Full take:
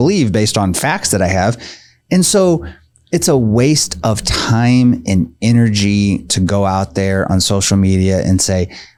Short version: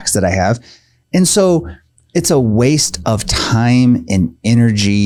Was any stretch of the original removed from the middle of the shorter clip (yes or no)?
no